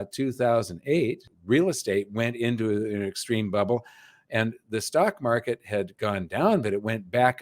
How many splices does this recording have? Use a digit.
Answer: 1